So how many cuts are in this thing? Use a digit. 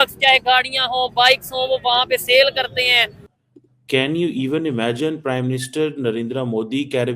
1